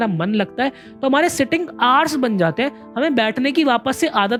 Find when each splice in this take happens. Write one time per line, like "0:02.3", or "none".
none